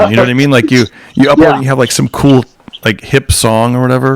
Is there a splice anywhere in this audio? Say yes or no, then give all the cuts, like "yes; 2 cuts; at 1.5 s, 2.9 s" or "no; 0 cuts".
no; 0 cuts